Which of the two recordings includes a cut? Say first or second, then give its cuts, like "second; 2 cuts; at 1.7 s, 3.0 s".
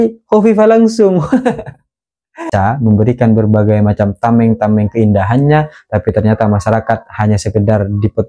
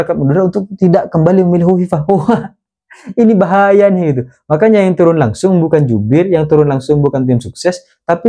first; 1 cut; at 2.4 s